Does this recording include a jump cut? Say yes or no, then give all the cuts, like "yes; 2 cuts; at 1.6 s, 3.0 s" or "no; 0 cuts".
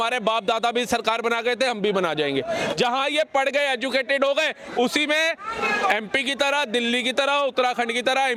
no; 0 cuts